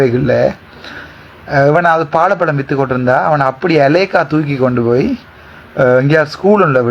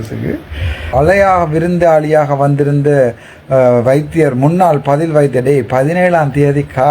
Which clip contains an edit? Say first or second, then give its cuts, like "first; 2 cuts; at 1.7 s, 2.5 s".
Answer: second; 1 cut; at 0.9 s